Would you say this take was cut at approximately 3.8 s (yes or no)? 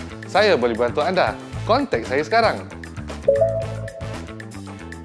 yes